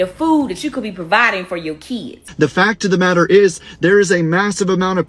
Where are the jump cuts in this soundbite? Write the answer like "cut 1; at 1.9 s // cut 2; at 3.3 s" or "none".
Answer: cut 1; at 2.2 s